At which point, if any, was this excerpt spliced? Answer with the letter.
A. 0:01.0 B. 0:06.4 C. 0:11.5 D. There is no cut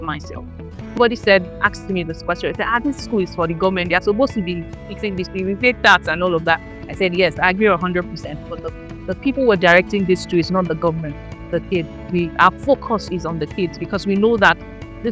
A